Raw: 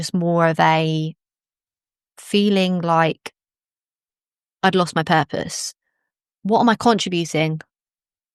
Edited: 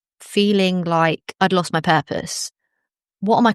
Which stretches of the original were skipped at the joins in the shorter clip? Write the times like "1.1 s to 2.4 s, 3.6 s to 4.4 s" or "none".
3.2 s to 4.5 s